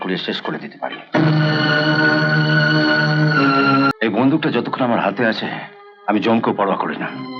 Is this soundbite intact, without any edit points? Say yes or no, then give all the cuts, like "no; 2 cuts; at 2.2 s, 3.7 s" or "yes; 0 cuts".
no; 1 cut; at 3.9 s